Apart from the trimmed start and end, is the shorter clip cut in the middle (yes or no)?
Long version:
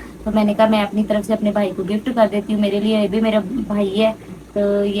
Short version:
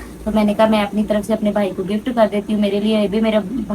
no